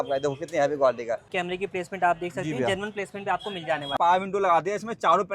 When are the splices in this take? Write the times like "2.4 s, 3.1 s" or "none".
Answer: 1.3 s, 3.9 s